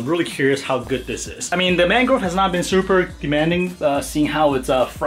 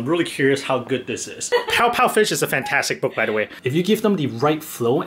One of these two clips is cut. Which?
second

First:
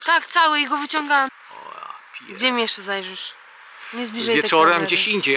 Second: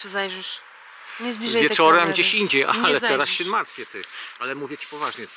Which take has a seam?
first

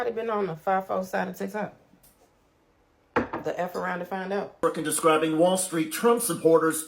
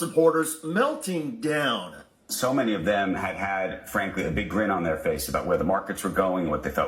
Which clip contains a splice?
first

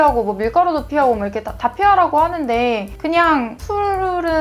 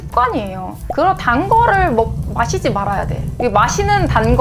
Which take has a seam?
first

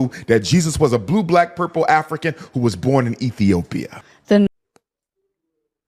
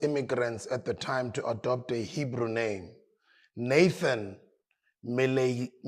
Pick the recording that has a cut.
first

